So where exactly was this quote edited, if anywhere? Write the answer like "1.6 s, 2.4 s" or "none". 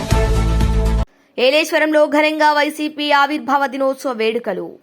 none